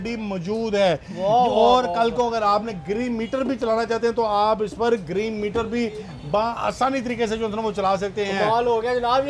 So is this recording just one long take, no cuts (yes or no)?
yes